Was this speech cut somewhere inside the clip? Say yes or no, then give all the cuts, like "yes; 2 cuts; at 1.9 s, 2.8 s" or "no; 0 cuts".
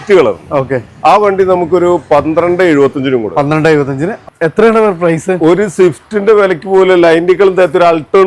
yes; 1 cut; at 4.1 s